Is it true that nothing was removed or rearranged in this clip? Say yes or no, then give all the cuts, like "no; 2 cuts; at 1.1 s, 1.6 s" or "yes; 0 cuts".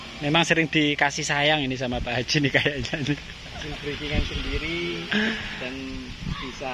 yes; 0 cuts